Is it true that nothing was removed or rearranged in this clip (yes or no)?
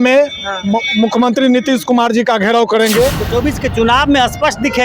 no